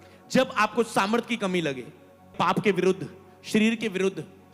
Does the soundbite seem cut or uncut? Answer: cut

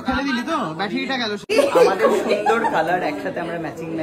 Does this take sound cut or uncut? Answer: cut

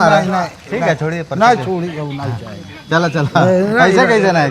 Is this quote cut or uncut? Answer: uncut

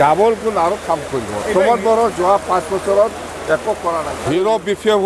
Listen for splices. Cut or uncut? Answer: cut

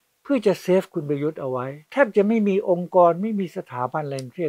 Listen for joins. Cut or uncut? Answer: cut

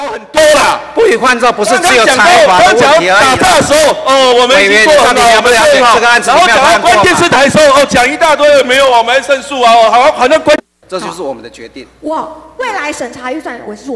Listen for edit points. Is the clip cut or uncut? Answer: cut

